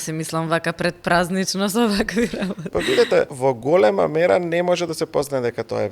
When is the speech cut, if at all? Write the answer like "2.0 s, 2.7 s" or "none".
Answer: 2.6 s, 3.3 s